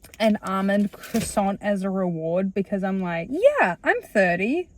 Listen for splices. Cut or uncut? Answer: cut